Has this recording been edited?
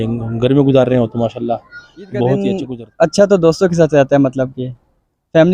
yes; 1 cut; at 2.6 s

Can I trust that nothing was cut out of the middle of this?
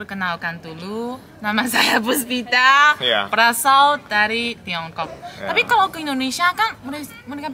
yes; 0 cuts

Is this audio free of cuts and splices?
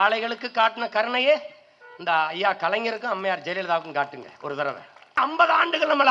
no; 1 cut; at 5.1 s

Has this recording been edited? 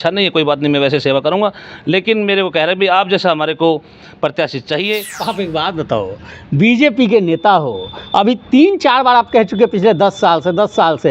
yes; 1 cut; at 5.2 s

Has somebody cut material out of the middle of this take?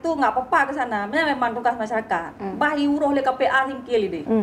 no; 0 cuts

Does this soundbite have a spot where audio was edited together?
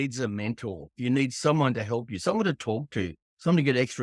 yes; 1 cut; at 0.9 s

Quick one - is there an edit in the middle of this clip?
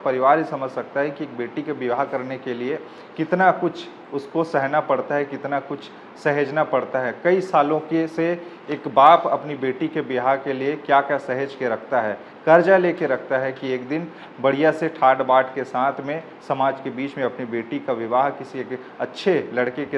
no; 0 cuts

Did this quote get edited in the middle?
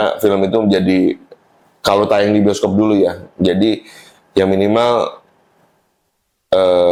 no; 0 cuts

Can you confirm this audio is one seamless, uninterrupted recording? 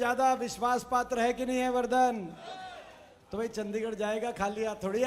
yes; 0 cuts

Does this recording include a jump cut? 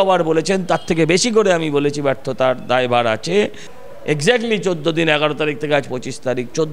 yes; 1 cut; at 3.7 s

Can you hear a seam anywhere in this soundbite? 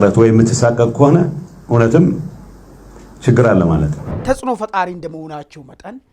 yes; 1 cut; at 4.0 s

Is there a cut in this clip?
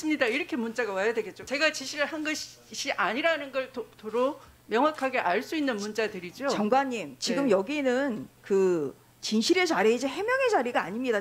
yes; 1 cut; at 1.5 s

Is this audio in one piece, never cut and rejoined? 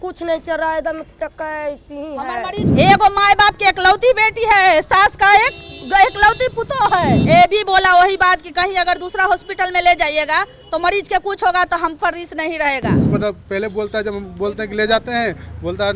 no; 3 cuts; at 2.6 s, 7.2 s, 13.1 s

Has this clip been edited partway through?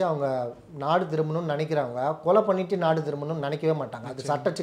no; 0 cuts

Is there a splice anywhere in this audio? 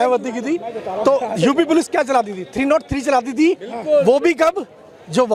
no; 0 cuts

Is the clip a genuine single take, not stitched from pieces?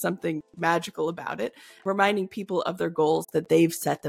no; 1 cut; at 1.7 s

